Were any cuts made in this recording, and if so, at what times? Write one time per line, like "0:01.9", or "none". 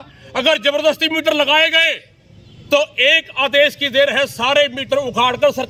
none